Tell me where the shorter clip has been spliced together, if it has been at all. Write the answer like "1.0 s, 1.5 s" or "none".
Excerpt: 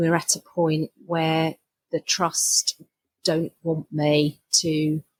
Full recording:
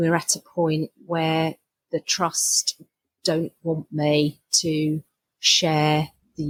none